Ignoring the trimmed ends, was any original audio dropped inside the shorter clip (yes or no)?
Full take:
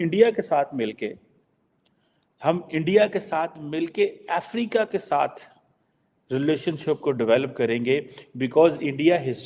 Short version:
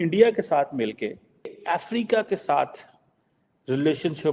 yes